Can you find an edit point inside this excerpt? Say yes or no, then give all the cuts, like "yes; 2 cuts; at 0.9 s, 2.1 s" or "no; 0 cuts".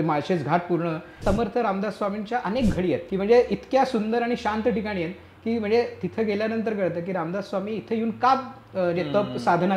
yes; 2 cuts; at 1.2 s, 3.1 s